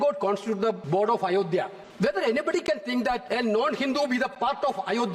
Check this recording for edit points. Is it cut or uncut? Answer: cut